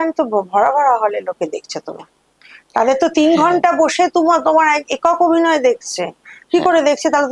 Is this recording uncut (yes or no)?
yes